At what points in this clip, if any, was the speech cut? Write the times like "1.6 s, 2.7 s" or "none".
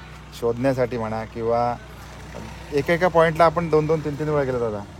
none